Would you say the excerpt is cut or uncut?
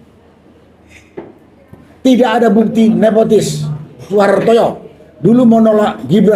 cut